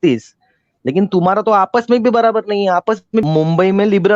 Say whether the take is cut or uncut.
cut